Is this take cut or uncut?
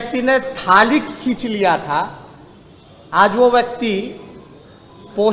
uncut